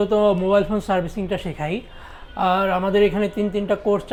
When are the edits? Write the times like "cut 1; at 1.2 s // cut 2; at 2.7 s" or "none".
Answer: none